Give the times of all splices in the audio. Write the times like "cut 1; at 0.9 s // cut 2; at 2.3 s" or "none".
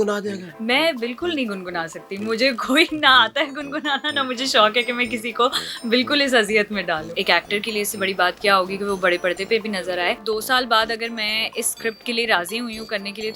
cut 1; at 7.0 s // cut 2; at 10.2 s

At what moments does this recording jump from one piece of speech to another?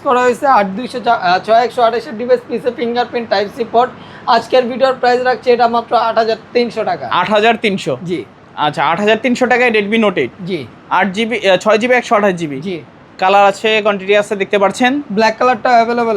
none

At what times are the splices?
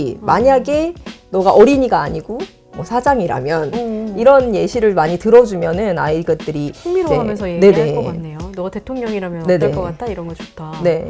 none

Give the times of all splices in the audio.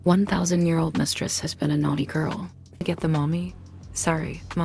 cut 1; at 2.8 s

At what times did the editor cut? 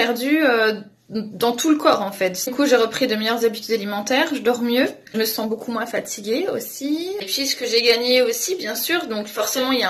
cut 1; at 2.4 s

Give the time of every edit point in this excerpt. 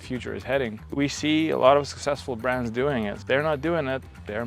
cut 1; at 0.9 s // cut 2; at 3.2 s

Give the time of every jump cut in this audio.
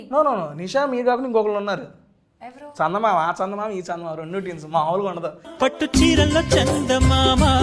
none

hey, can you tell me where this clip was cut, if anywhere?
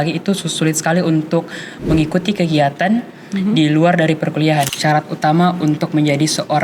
cut 1; at 4.7 s

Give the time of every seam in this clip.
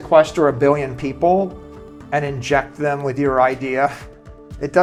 none

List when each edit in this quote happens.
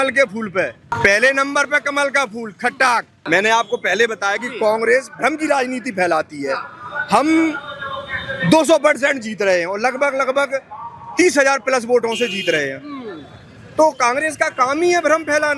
cut 1; at 0.9 s // cut 2; at 3.1 s

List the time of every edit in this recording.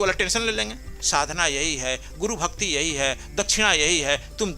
cut 1; at 1.0 s

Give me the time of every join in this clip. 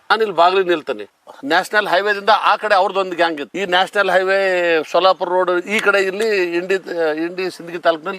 cut 1; at 1.2 s // cut 2; at 3.5 s

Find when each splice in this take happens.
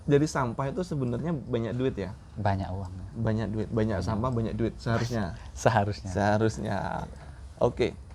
none

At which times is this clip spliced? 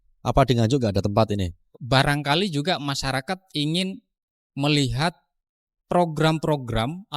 cut 1; at 1.8 s

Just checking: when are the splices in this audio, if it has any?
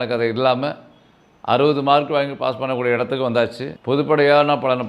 cut 1; at 3.7 s

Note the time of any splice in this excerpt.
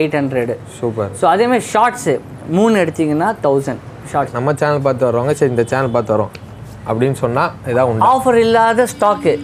cut 1; at 4.4 s

